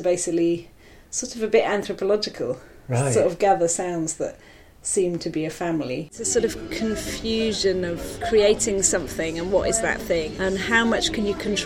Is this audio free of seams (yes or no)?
no